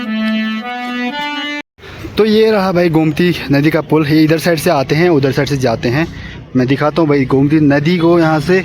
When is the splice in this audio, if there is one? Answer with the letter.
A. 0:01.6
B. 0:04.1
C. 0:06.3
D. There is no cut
A